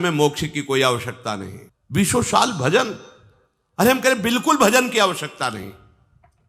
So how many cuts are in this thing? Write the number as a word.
one